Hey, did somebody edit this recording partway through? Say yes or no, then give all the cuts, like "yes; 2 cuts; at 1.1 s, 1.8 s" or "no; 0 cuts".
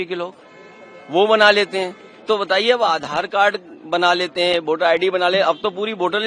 no; 0 cuts